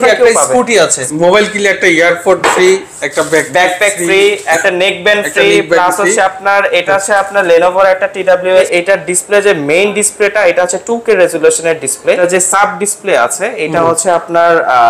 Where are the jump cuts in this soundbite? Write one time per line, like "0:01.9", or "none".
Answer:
0:01.0
0:08.7
0:12.2